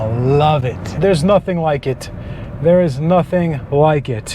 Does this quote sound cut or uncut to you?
cut